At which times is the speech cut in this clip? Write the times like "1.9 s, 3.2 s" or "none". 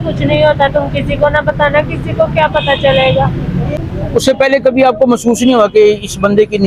3.8 s